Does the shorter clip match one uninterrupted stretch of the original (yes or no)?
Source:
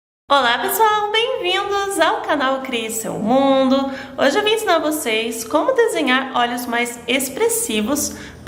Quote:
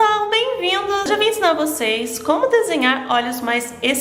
no